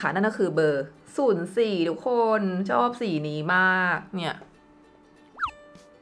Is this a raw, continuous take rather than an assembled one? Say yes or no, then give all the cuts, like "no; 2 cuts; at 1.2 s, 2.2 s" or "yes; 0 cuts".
yes; 0 cuts